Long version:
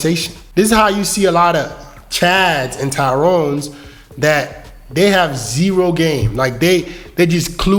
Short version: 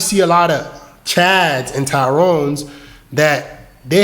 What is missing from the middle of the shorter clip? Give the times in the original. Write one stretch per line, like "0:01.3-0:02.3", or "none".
none